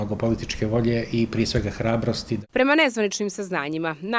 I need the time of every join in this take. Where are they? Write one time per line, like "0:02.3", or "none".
none